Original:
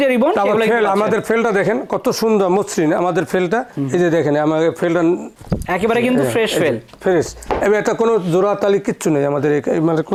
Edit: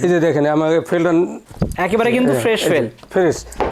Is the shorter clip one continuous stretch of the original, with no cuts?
yes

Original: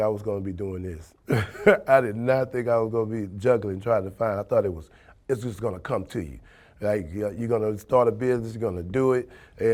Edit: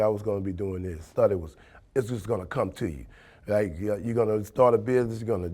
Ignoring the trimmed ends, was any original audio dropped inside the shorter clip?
yes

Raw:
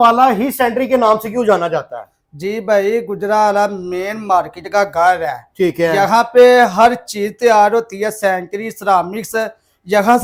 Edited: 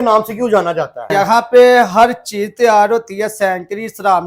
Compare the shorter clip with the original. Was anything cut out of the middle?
yes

